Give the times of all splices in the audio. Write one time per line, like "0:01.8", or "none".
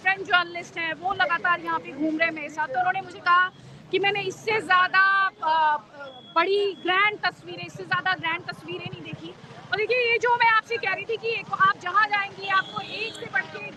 none